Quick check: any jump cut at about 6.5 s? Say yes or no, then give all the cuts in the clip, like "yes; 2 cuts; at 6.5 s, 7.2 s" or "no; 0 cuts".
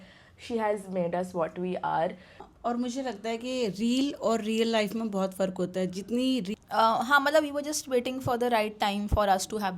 yes; 2 cuts; at 2.3 s, 6.5 s